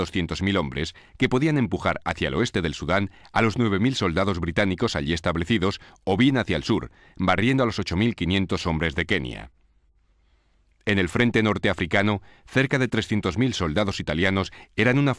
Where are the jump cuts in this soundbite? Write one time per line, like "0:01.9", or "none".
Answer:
0:04.0